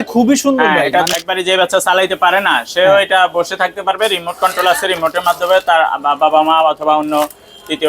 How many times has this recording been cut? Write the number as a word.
one